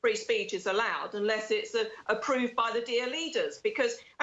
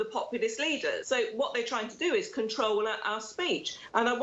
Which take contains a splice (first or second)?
second